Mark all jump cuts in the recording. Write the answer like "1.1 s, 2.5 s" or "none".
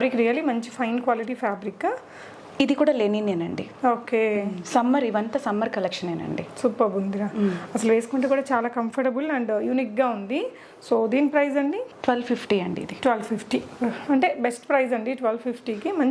none